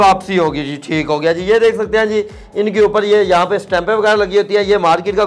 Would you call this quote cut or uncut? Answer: uncut